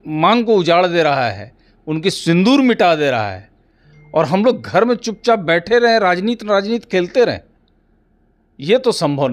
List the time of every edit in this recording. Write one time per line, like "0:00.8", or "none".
none